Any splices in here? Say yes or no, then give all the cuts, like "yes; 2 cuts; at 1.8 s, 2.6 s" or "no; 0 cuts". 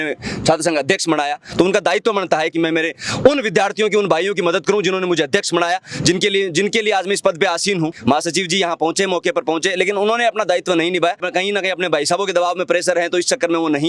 yes; 3 cuts; at 2.5 s, 8.0 s, 11.3 s